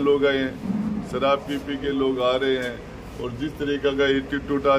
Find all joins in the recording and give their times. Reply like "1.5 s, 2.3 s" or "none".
none